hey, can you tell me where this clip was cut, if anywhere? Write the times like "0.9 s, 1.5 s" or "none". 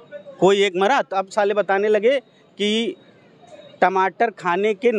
none